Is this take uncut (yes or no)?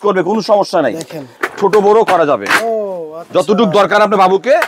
no